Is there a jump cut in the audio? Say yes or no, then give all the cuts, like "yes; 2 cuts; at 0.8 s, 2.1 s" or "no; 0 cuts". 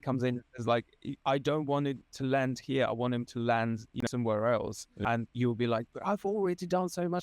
yes; 2 cuts; at 4.0 s, 5.0 s